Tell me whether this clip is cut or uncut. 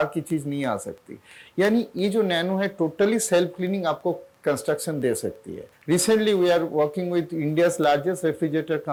uncut